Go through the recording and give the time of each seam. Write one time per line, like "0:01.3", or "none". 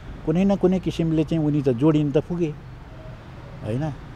none